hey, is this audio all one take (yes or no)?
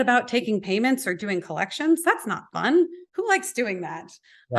no